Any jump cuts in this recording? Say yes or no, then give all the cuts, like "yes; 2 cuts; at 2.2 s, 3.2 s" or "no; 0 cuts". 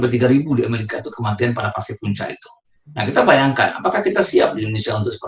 no; 0 cuts